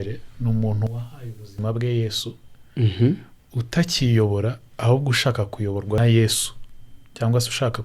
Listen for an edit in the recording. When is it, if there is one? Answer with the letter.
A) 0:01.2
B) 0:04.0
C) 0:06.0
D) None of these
C